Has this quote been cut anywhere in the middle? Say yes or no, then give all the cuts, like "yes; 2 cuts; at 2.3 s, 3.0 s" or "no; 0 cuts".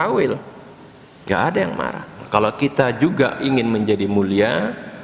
yes; 1 cut; at 2.1 s